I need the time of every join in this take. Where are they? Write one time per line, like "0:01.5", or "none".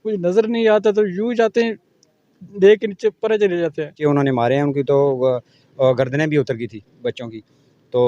0:04.0